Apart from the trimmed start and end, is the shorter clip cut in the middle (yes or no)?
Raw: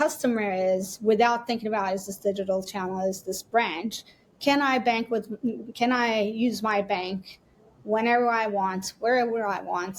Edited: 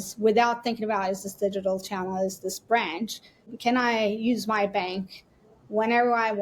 yes